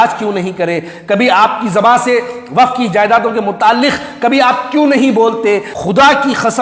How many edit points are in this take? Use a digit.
1